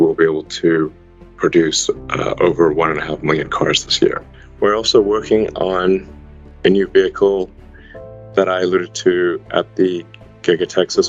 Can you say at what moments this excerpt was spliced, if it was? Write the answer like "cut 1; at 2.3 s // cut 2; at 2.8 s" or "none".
cut 1; at 4.4 s